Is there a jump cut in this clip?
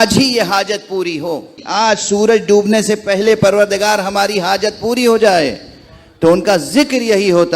yes; 1 cut; at 1.6 s

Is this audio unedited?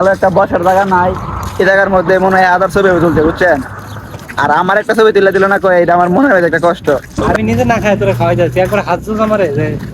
no; 1 cut; at 7.2 s

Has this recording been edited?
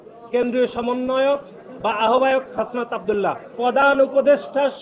yes; 1 cut; at 3.6 s

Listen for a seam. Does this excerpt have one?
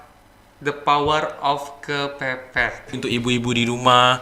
yes; 1 cut; at 3.0 s

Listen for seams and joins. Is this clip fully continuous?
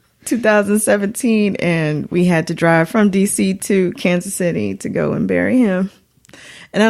yes; 0 cuts

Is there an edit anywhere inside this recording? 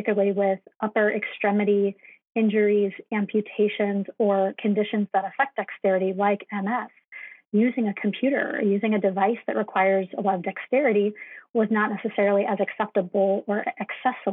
no; 0 cuts

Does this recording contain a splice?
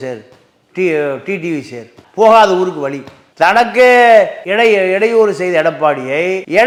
no; 0 cuts

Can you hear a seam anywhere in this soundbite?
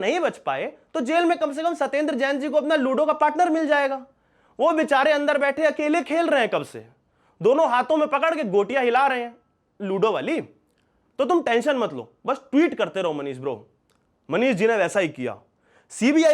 no; 0 cuts

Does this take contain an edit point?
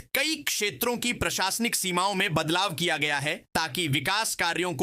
no; 0 cuts

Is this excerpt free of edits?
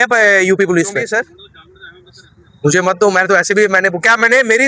no; 1 cut; at 1.1 s

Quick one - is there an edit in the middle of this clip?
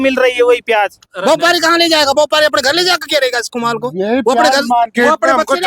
yes; 1 cut; at 1.0 s

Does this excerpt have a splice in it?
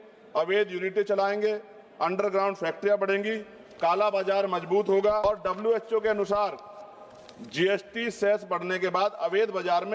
yes; 1 cut; at 5.2 s

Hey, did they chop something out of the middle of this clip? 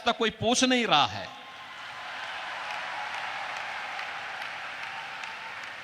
no; 0 cuts

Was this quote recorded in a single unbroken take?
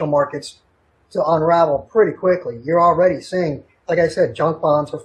yes; 0 cuts

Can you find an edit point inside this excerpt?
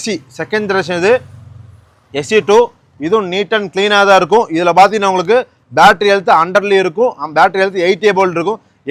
no; 0 cuts

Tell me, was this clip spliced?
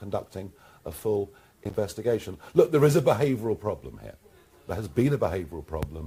no; 0 cuts

